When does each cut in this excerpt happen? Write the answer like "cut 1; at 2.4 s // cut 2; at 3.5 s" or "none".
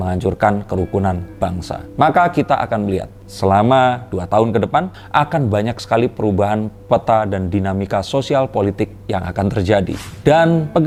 none